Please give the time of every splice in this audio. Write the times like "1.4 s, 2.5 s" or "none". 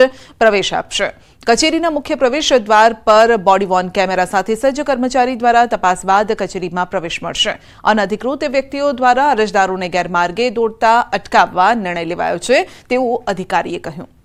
none